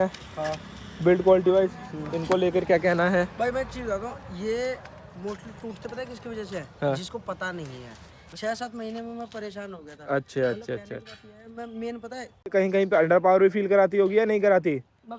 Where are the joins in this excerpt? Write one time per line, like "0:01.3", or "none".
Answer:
0:08.3
0:12.5